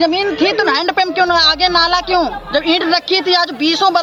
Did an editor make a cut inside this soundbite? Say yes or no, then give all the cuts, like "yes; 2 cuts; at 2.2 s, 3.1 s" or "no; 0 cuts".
no; 0 cuts